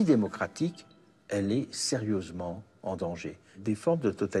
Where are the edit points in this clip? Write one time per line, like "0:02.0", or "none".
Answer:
0:00.9
0:03.6